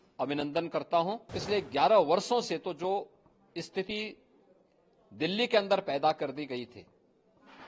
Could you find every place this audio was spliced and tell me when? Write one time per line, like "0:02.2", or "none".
0:01.4